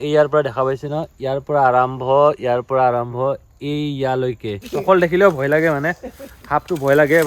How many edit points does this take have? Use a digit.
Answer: 1